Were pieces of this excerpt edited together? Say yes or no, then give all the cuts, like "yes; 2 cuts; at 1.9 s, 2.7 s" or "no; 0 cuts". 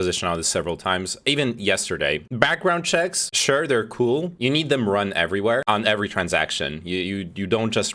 yes; 1 cut; at 2.3 s